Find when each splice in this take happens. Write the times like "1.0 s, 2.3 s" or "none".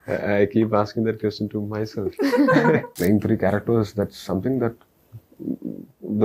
2.9 s